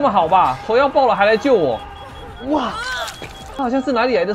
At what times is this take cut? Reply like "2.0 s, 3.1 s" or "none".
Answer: 3.4 s